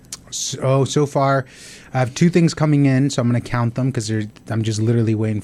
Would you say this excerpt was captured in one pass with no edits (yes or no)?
yes